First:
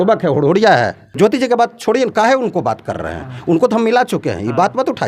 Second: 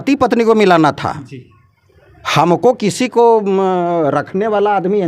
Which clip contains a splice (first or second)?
first